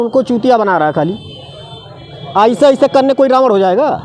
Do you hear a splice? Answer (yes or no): no